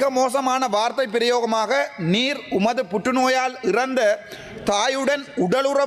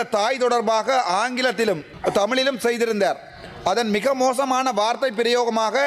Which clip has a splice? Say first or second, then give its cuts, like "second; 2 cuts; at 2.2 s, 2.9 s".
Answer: second; 1 cut; at 1.9 s